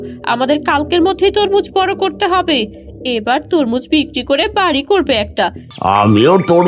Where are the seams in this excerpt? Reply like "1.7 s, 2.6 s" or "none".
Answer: 5.6 s

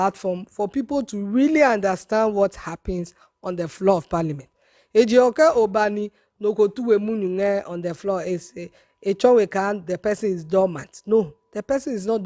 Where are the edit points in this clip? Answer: none

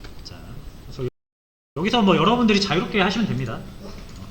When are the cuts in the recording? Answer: none

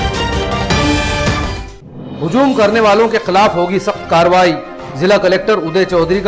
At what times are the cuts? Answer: 1.5 s

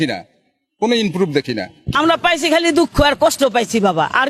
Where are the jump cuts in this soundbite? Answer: 1.9 s

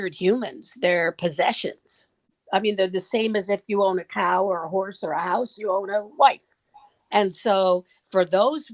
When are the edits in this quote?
2.3 s

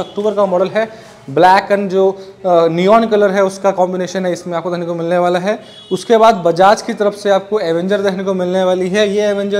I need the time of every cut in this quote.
none

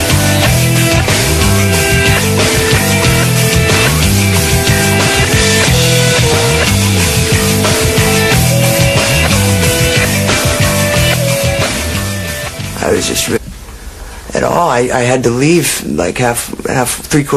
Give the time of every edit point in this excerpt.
none

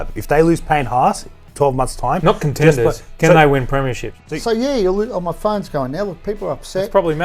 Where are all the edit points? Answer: 4.1 s

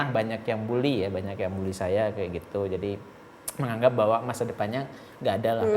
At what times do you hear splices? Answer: none

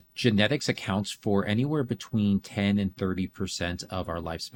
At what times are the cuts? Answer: none

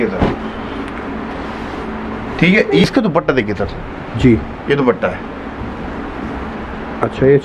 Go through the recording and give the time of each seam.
2.8 s

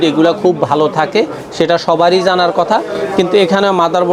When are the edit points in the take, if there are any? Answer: none

